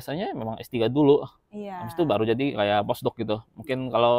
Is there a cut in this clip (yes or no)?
no